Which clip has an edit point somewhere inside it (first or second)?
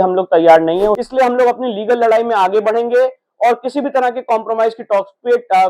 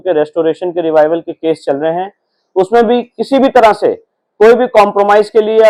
first